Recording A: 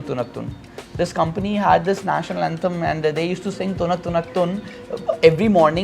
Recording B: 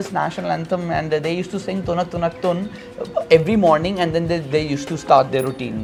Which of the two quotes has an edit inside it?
A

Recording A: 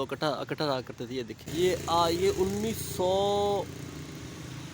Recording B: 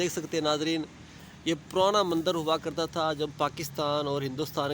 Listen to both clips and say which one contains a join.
A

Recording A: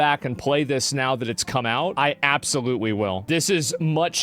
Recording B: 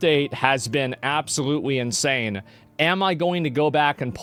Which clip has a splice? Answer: A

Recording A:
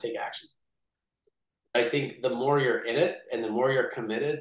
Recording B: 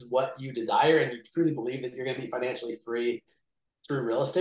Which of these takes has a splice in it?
A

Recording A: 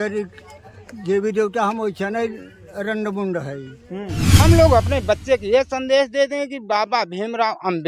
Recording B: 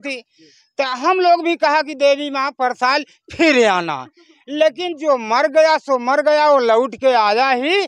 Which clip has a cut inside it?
A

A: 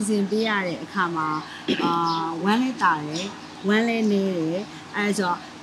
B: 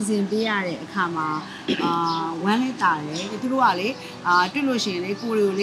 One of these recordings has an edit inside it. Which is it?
B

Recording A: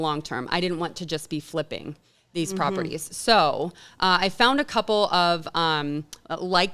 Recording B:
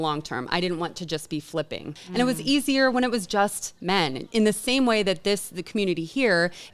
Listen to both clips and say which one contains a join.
B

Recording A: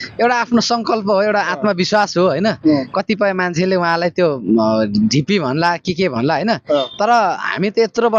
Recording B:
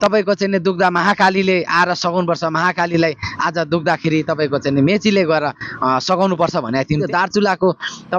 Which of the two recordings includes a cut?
B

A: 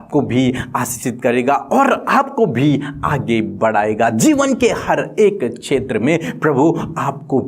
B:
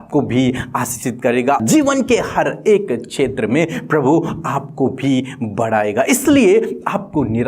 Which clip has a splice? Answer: B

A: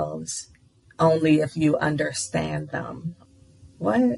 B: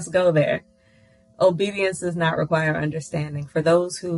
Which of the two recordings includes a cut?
A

